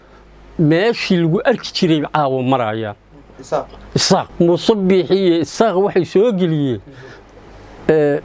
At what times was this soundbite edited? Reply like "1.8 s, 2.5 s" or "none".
4.3 s